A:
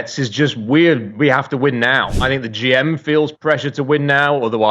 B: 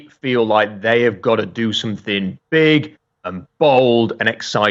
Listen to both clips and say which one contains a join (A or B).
A